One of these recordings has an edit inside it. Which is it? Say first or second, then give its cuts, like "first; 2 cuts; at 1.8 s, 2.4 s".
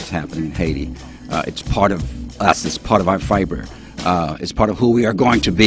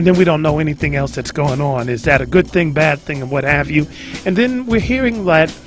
second; 1 cut; at 4.6 s